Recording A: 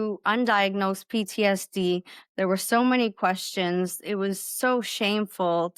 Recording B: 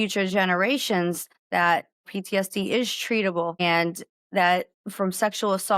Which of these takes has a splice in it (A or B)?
B